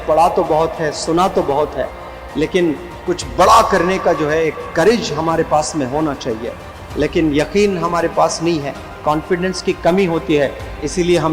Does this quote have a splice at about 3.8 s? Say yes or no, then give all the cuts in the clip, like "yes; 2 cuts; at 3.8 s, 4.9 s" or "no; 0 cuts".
no; 0 cuts